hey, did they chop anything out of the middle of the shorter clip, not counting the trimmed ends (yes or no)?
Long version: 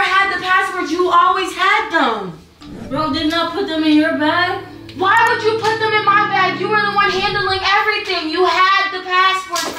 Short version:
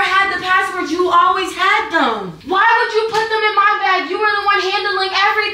yes